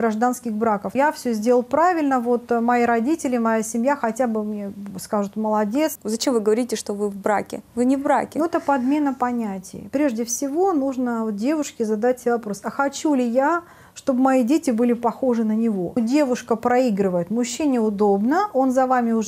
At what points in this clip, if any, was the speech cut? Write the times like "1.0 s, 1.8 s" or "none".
0.9 s, 6.0 s, 9.7 s, 16.0 s